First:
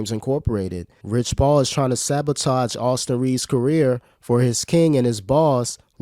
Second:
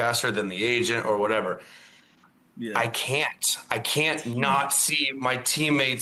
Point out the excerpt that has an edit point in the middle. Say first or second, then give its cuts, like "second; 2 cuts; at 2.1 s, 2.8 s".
first; 1 cut; at 0.9 s